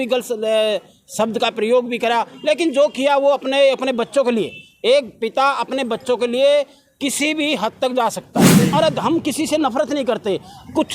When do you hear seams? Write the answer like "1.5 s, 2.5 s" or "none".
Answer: 8.7 s